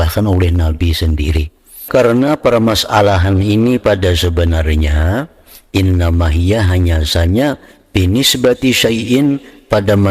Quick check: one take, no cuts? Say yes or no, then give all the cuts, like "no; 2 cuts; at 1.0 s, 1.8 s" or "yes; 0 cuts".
no; 1 cut; at 1.8 s